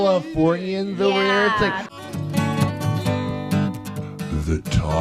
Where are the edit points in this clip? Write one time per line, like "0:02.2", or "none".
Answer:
none